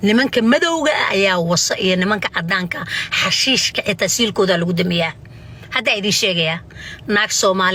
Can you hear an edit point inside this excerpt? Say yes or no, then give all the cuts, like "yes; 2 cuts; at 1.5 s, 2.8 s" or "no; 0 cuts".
no; 0 cuts